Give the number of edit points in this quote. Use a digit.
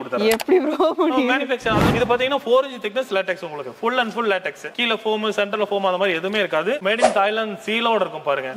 2